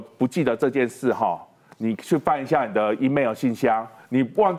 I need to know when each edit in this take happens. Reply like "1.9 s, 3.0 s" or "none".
none